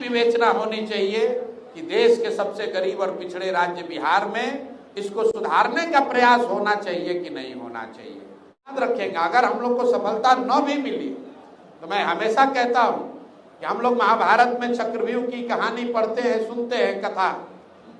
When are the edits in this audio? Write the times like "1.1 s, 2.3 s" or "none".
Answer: 8.8 s